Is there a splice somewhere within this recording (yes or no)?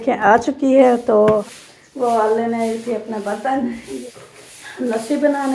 yes